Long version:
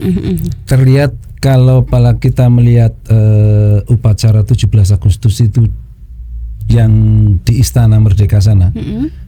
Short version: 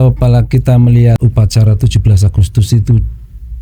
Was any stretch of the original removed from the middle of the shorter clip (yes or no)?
yes